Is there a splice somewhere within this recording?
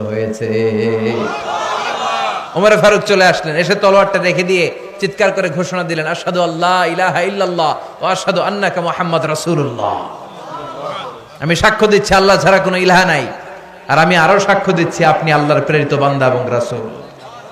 no; 0 cuts

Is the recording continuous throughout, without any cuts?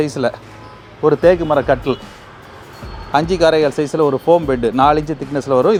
yes; 0 cuts

